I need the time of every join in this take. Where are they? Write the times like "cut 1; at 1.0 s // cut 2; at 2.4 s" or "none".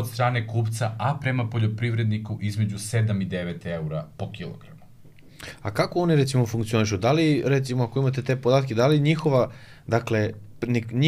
none